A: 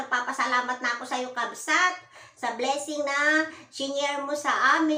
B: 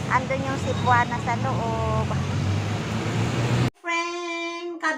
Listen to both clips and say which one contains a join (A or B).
B